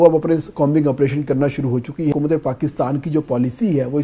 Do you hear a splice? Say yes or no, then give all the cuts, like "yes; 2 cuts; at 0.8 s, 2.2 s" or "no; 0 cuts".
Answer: yes; 1 cut; at 2.1 s